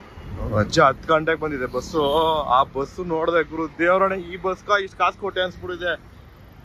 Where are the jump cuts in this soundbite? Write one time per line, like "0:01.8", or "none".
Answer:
none